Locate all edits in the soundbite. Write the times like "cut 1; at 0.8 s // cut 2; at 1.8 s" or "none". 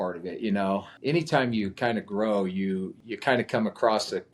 cut 1; at 0.9 s // cut 2; at 3.0 s